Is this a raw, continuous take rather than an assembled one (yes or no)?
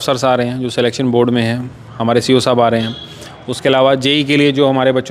yes